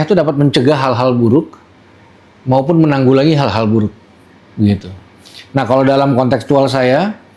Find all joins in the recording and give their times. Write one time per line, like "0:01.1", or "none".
none